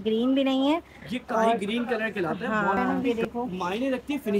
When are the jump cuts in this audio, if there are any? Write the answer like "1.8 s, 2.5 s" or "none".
2.8 s